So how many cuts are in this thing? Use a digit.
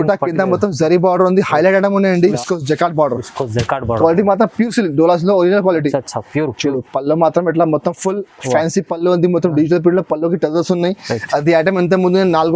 1